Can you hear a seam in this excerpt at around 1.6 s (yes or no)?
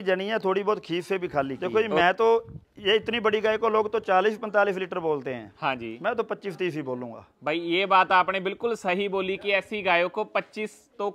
yes